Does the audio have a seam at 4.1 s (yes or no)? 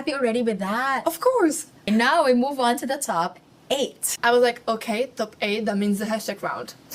yes